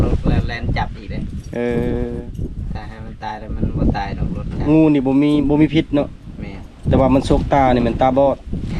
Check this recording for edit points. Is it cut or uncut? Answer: uncut